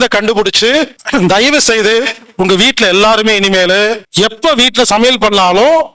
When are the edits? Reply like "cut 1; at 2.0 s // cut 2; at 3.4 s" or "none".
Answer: cut 1; at 1.0 s // cut 2; at 4.0 s